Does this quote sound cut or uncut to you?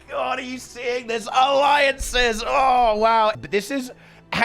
cut